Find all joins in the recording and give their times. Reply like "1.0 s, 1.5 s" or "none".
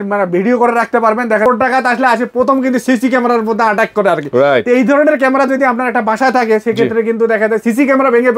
1.5 s